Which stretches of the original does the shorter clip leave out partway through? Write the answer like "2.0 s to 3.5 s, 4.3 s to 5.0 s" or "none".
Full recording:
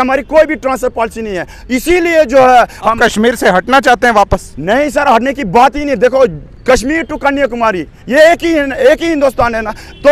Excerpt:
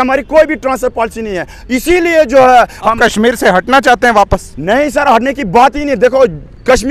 none